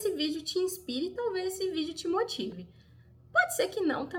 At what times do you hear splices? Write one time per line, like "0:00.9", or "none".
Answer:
none